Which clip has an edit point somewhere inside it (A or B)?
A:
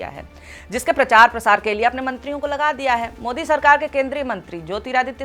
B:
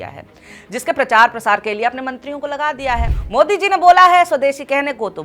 B